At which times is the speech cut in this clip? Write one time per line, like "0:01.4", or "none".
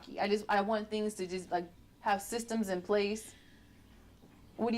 none